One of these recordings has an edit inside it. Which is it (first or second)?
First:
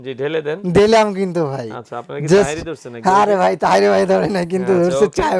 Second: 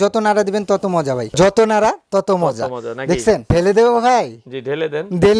second